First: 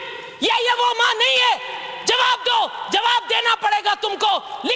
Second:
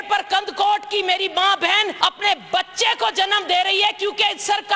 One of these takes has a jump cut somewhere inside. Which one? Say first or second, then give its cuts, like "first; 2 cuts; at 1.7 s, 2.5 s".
second; 1 cut; at 1.9 s